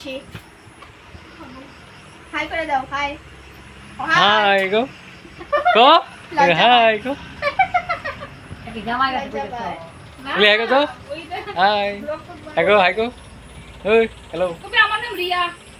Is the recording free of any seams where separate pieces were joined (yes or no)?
yes